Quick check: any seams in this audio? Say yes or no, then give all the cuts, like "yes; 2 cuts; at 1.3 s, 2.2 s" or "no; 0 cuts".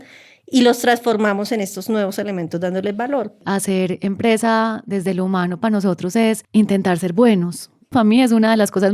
yes; 3 cuts; at 3.4 s, 6.4 s, 7.9 s